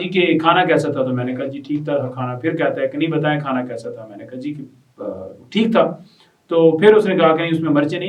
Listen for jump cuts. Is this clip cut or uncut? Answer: uncut